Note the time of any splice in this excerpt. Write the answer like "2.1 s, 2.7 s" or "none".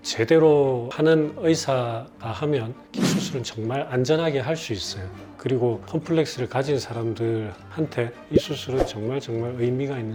none